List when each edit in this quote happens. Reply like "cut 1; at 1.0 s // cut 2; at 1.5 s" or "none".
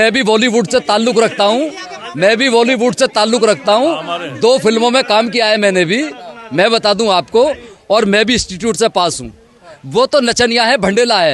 none